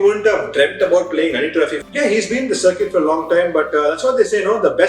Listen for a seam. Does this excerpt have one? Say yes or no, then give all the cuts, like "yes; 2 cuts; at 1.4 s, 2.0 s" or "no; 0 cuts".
yes; 1 cut; at 1.8 s